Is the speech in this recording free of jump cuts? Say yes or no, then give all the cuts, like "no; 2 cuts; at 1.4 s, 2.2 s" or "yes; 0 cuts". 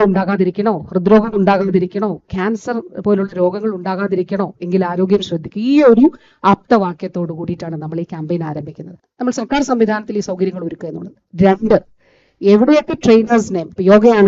no; 1 cut; at 9.0 s